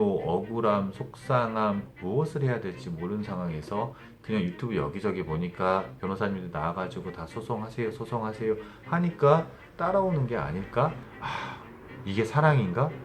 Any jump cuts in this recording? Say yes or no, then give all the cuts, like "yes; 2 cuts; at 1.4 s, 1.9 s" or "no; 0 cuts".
yes; 1 cut; at 11.1 s